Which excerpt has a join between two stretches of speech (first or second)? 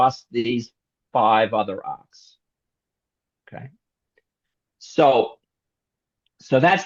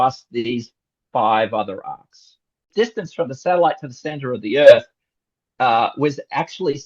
second